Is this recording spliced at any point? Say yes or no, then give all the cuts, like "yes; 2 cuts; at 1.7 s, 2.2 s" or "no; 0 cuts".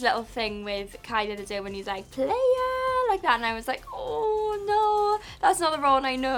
no; 0 cuts